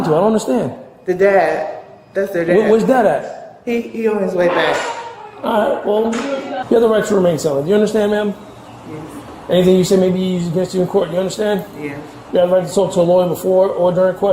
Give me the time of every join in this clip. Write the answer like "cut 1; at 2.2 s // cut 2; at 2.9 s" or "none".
cut 1; at 6.6 s